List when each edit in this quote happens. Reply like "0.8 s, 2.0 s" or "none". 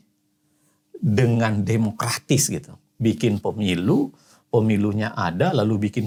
none